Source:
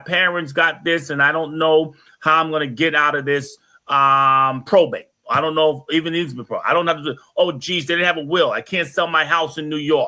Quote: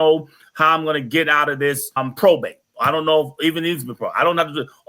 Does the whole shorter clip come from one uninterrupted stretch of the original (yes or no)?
no